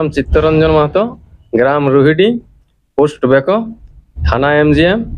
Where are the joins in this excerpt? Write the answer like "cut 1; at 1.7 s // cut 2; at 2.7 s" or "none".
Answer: none